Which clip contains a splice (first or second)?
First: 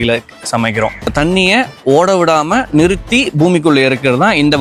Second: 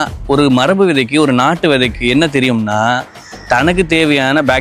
first